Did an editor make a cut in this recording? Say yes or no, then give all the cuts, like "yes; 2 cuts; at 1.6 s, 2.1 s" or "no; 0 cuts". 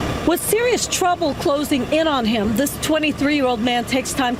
no; 0 cuts